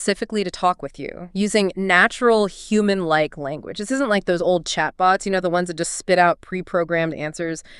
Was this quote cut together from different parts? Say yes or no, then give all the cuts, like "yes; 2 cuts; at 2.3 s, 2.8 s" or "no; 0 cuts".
no; 0 cuts